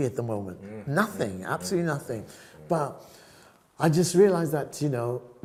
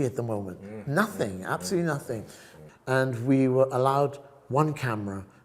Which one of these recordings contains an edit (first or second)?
second